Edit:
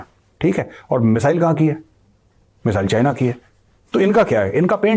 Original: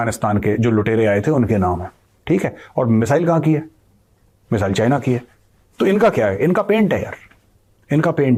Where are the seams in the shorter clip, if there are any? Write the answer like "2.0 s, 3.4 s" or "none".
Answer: none